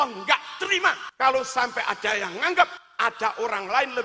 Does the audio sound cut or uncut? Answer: cut